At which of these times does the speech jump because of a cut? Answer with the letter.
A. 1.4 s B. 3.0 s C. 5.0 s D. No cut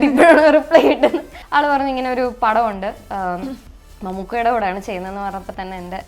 A